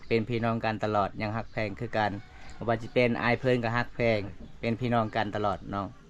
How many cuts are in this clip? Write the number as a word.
zero